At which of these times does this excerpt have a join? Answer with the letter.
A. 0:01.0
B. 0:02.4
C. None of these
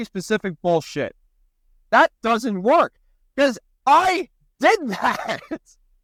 C